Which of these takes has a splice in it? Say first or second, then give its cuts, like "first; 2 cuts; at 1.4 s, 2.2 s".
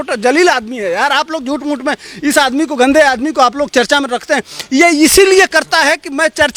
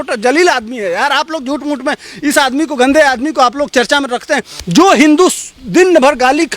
second; 1 cut; at 4.5 s